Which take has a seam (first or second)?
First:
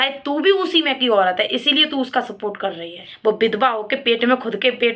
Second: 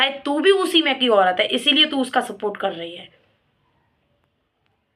first